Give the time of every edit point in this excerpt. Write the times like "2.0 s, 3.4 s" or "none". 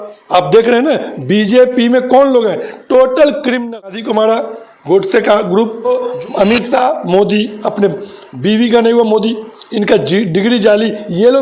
4.0 s, 5.9 s